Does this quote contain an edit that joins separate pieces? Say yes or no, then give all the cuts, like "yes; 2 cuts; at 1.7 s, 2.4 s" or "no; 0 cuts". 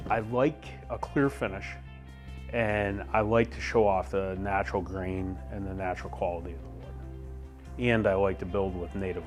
no; 0 cuts